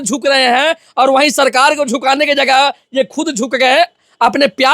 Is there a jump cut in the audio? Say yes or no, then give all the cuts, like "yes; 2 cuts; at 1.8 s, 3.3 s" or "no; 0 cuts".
no; 0 cuts